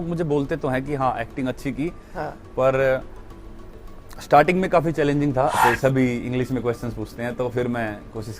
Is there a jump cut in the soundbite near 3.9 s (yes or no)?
no